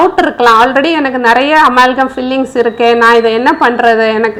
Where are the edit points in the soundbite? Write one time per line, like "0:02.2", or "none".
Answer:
none